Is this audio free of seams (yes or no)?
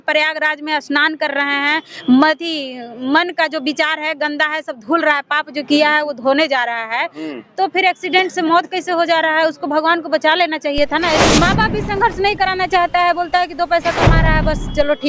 no